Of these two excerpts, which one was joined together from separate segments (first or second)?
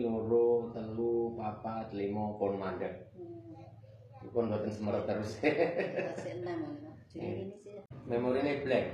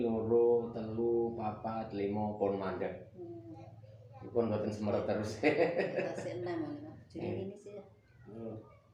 first